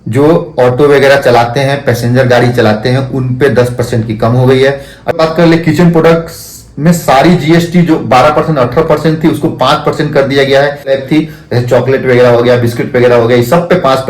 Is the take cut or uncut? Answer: cut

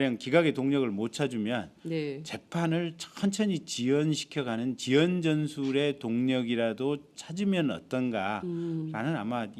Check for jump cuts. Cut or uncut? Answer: uncut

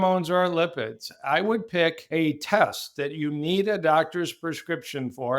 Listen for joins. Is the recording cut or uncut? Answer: cut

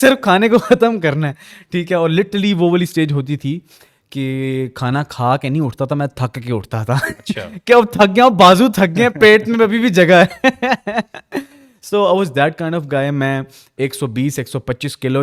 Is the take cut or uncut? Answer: uncut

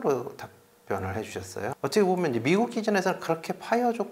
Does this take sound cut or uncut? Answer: cut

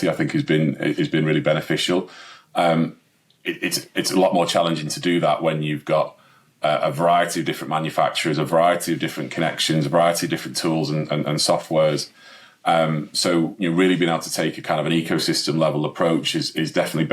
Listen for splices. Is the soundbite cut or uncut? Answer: uncut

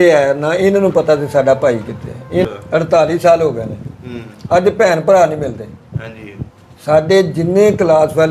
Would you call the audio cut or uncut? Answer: cut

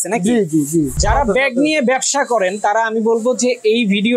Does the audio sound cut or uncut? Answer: cut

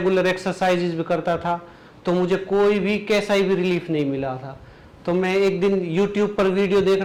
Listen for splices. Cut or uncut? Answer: uncut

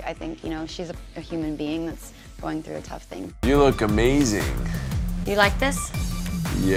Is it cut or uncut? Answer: uncut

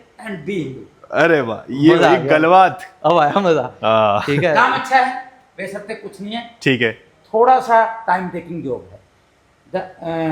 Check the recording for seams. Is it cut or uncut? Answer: uncut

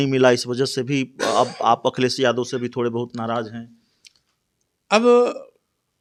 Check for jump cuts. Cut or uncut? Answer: uncut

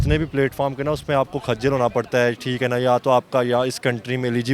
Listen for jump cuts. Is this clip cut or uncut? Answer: uncut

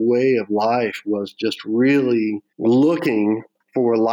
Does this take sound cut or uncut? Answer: cut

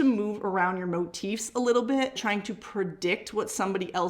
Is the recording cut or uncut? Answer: cut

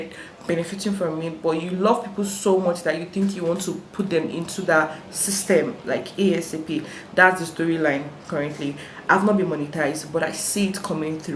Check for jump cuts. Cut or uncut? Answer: uncut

